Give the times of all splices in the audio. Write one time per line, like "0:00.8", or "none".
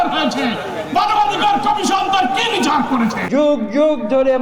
0:03.2